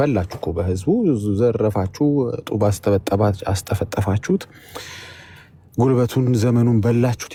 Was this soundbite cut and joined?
no; 0 cuts

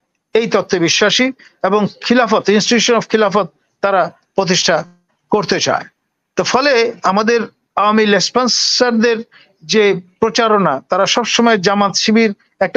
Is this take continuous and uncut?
yes; 0 cuts

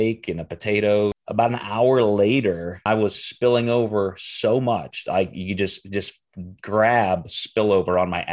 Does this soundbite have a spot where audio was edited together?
yes; 2 cuts; at 1.2 s, 2.8 s

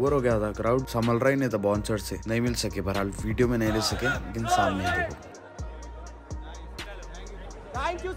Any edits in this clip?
no; 0 cuts

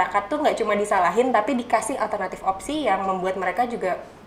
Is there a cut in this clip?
no; 0 cuts

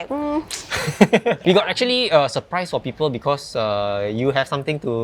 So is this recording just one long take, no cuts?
no; 1 cut; at 1.4 s

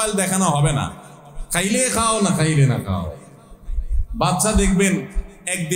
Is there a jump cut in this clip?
no; 0 cuts

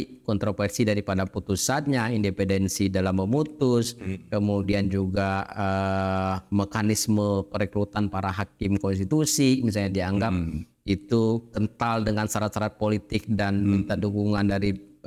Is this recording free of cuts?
yes; 0 cuts

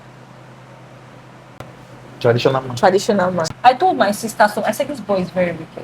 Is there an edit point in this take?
yes; 1 cut; at 3.4 s

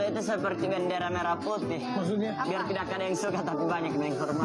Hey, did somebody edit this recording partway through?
no; 0 cuts

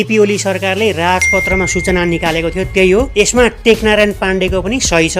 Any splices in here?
no; 0 cuts

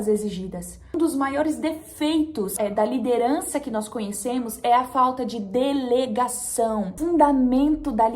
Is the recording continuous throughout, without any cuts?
no; 2 cuts; at 0.9 s, 6.9 s

